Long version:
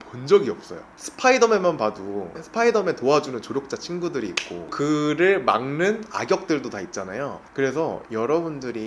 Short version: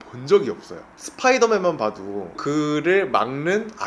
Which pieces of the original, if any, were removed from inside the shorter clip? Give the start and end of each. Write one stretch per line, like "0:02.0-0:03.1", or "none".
0:02.3-0:04.6